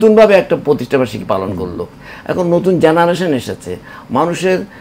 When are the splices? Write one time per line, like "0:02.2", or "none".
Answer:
0:01.9

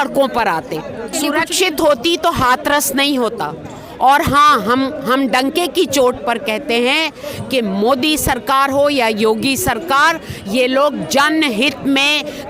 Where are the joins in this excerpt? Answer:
0:01.1

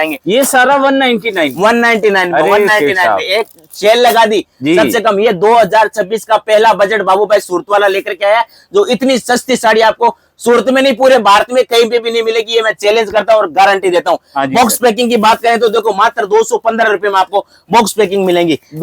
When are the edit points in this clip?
none

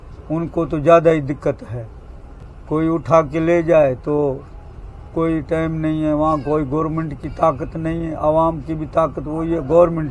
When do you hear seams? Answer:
none

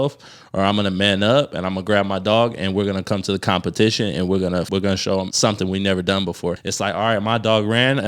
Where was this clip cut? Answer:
0:04.8
0:06.7

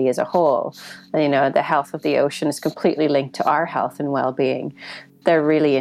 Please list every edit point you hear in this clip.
0:03.3

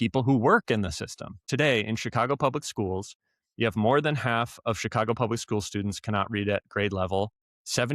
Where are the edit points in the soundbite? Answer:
0:01.5

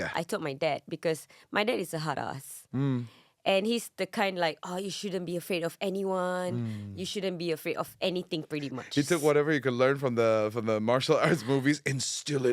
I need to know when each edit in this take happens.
none

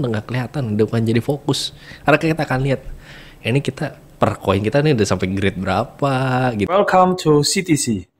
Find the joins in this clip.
0:06.7

